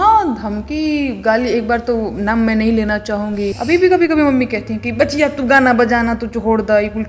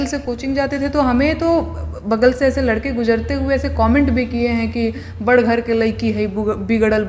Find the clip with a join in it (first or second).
first